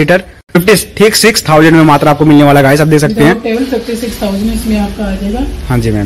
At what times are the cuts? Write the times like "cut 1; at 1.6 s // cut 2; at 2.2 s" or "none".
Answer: none